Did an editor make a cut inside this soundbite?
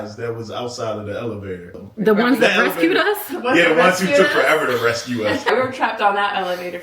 yes; 2 cuts; at 1.8 s, 5.5 s

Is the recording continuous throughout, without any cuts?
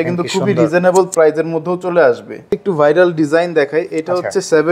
no; 1 cut; at 2.5 s

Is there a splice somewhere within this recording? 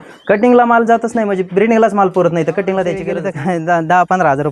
yes; 1 cut; at 3.2 s

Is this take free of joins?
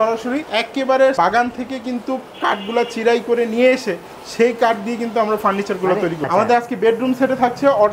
no; 2 cuts; at 1.1 s, 6.3 s

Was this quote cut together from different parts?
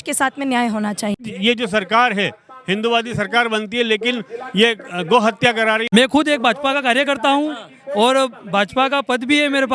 yes; 2 cuts; at 1.2 s, 5.8 s

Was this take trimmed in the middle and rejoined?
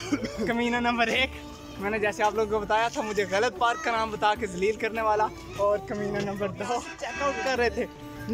yes; 1 cut; at 7.0 s

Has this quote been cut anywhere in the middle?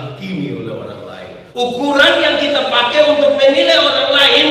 yes; 1 cut; at 1.4 s

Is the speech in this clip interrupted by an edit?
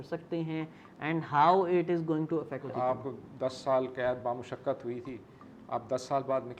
yes; 1 cut; at 2.7 s

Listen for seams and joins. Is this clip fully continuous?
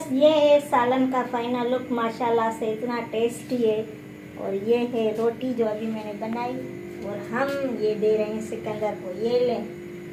yes; 0 cuts

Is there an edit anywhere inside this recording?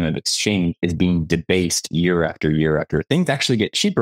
no; 0 cuts

